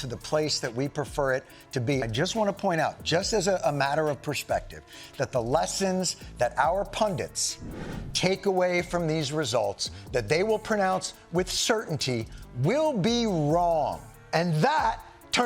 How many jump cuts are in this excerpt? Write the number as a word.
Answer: two